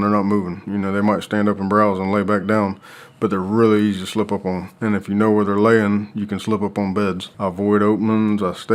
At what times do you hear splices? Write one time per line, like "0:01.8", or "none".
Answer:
0:07.3